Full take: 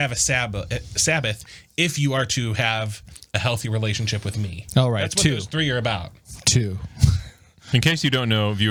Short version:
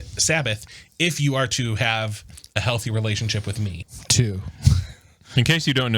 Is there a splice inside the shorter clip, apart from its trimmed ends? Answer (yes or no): yes